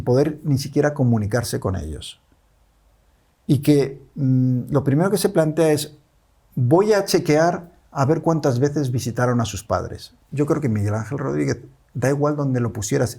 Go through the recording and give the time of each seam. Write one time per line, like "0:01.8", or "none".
0:10.2

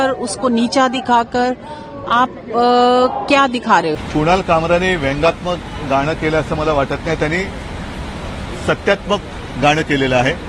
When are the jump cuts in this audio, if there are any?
0:03.9

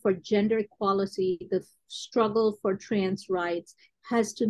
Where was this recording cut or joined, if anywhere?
none

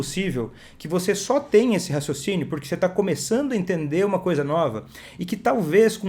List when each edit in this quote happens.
none

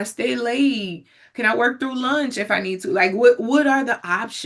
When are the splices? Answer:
none

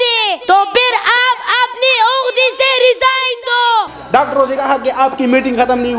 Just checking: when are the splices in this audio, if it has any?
0:03.9

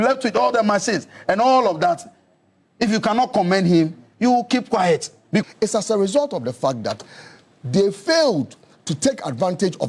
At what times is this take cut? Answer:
0:05.4

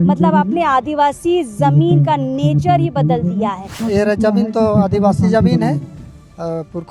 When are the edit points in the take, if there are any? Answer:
0:03.8

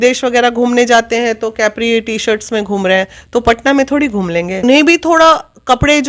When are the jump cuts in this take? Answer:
0:04.6

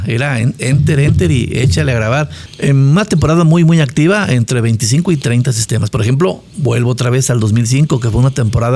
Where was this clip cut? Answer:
0:02.4

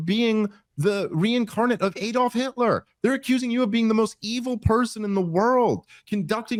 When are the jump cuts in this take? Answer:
none

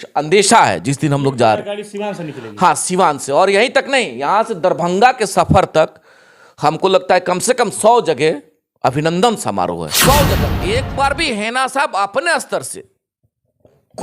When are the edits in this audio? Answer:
0:10.5

